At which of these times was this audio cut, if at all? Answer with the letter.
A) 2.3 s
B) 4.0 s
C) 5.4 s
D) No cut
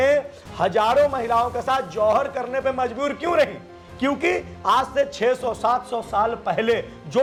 D